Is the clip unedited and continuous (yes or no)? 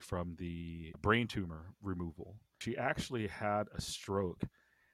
no